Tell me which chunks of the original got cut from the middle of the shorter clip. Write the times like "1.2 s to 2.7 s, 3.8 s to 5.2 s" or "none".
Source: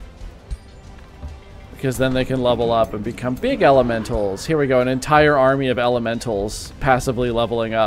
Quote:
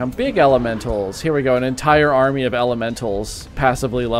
none